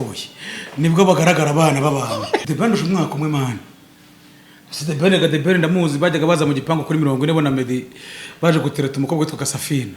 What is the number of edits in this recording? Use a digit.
1